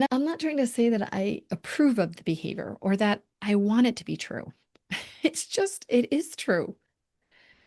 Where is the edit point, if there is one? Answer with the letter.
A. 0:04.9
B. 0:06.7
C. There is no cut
C